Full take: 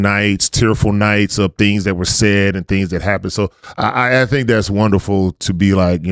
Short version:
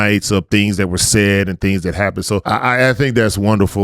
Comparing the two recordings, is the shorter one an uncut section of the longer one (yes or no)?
no